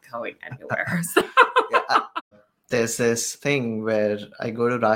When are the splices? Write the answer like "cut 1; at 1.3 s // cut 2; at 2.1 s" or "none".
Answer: cut 1; at 2.5 s // cut 2; at 3.3 s